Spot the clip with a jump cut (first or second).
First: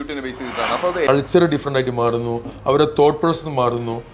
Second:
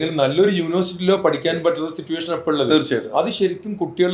first